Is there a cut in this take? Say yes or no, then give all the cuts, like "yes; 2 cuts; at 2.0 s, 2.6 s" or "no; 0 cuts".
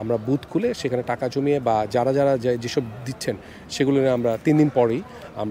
no; 0 cuts